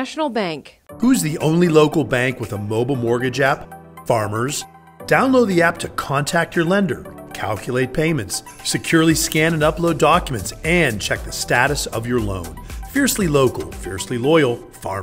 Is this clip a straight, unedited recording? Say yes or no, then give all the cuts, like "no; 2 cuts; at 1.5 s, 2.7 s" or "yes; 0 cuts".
yes; 0 cuts